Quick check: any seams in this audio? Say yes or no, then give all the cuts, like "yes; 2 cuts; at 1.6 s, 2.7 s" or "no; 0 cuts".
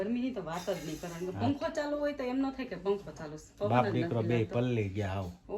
no; 0 cuts